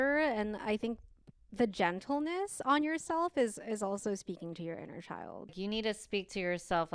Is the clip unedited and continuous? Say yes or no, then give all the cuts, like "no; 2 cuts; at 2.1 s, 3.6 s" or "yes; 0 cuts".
no; 1 cut; at 5.6 s